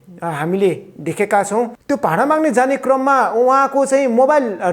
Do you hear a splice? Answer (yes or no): yes